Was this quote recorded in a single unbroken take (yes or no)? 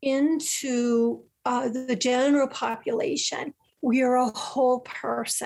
yes